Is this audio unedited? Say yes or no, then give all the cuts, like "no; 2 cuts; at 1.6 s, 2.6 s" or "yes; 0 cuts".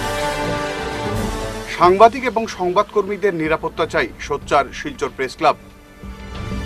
no; 1 cut; at 1.2 s